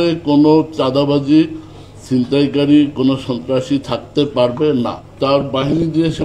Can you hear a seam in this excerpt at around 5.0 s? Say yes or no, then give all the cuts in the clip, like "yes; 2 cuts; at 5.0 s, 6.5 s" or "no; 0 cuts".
yes; 1 cut; at 5.0 s